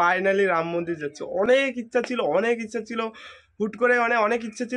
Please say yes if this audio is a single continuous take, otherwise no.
yes